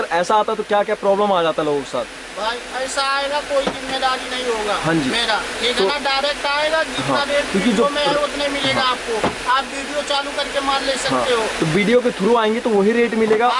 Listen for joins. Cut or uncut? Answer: uncut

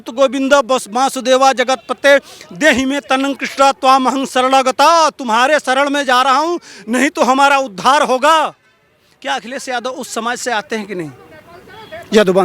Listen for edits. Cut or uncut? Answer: uncut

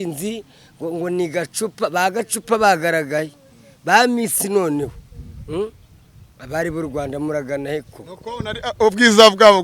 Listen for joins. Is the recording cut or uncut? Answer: uncut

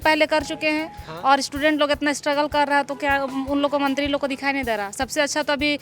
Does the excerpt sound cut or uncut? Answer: uncut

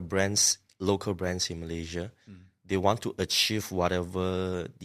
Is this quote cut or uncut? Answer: uncut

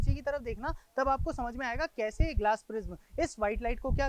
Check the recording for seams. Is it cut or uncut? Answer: uncut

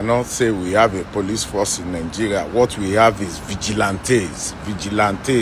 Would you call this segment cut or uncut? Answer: uncut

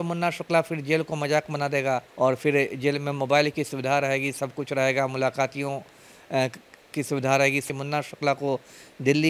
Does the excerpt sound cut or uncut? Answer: cut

